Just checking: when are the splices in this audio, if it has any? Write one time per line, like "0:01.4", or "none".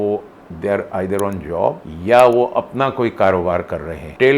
0:01.9